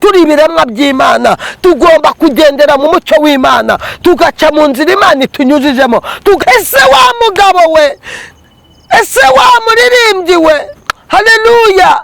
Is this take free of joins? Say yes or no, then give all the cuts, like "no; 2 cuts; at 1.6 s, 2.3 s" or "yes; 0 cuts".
no; 1 cut; at 6.4 s